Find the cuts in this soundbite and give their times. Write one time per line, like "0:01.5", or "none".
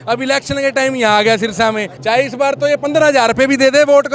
0:01.9